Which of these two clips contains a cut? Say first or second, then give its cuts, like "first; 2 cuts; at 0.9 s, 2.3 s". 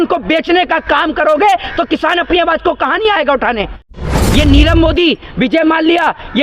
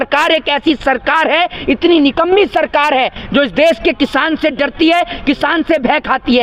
first; 1 cut; at 4.0 s